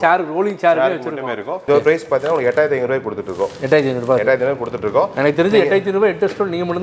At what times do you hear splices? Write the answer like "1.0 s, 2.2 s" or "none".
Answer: 1.7 s